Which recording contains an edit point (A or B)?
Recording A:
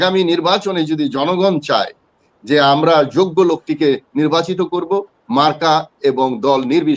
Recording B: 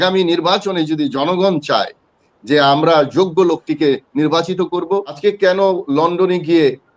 B